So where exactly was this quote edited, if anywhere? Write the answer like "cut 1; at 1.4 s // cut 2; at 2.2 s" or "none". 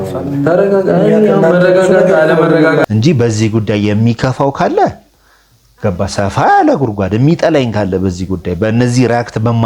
cut 1; at 2.8 s